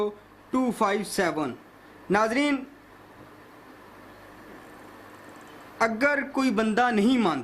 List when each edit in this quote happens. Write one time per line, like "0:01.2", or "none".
none